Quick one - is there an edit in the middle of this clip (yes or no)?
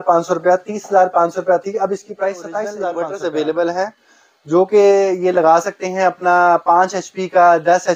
yes